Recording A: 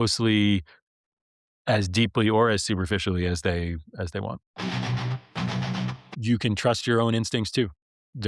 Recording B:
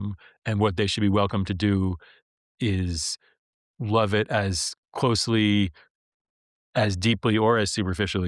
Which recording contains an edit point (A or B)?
A